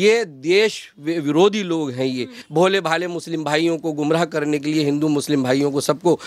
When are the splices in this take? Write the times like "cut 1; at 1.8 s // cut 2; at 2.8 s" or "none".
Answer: cut 1; at 2.4 s